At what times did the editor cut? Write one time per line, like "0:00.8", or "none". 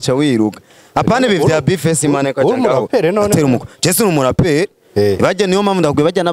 none